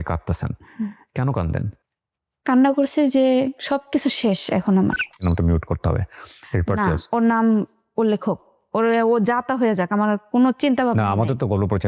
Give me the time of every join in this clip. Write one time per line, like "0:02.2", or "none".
0:05.2